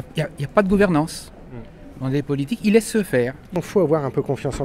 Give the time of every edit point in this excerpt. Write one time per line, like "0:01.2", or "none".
0:03.6